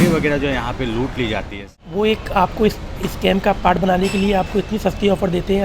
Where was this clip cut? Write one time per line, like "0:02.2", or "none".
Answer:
0:01.6